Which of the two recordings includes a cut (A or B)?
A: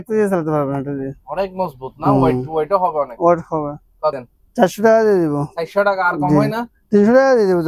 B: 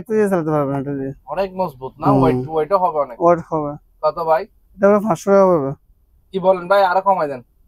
A